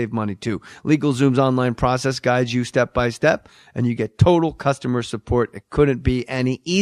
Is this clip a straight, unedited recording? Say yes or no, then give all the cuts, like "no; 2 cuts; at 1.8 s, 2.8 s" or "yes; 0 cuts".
no; 1 cut; at 3.1 s